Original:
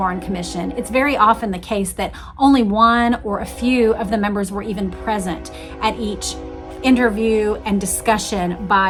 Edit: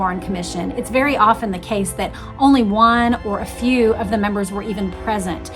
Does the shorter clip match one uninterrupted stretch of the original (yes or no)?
yes